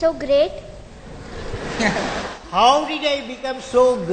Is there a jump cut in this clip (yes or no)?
no